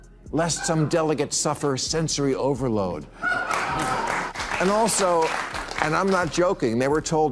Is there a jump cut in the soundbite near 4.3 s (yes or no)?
yes